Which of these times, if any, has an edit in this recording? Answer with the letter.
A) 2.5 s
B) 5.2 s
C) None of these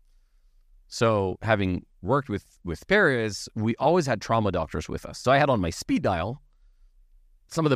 B